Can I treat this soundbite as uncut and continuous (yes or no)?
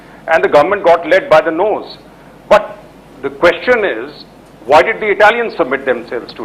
no